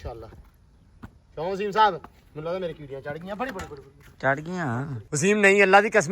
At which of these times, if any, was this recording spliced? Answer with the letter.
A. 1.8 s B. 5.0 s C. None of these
B